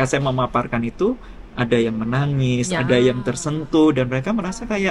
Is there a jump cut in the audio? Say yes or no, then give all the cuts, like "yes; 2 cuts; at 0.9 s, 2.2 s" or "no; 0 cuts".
no; 0 cuts